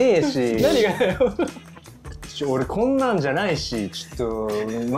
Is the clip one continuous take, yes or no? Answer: yes